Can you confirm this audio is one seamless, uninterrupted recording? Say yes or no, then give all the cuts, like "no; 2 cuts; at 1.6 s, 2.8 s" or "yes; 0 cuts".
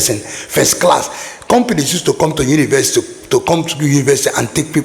yes; 0 cuts